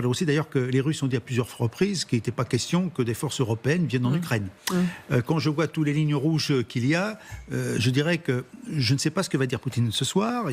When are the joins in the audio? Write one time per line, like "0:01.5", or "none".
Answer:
none